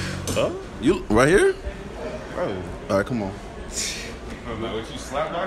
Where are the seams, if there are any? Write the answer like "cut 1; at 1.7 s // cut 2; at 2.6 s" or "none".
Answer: none